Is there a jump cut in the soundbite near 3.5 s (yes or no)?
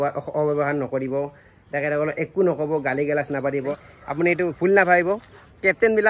yes